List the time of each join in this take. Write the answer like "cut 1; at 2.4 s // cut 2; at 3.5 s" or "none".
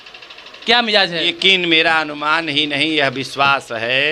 cut 1; at 1.3 s